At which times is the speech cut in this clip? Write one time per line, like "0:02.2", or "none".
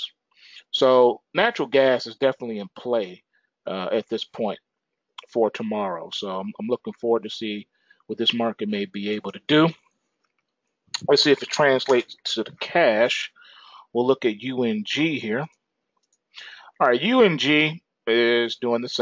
0:02.8